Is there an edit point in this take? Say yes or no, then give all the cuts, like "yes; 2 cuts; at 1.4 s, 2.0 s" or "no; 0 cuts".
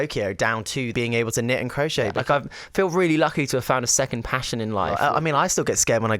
yes; 3 cuts; at 0.9 s, 2.2 s, 4.9 s